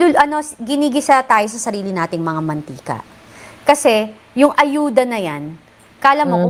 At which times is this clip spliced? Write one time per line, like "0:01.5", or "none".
none